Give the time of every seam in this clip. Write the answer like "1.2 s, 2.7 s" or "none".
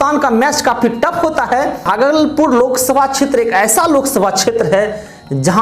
1.9 s